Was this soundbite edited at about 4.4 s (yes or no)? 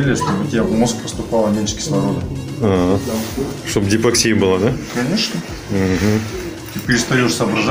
no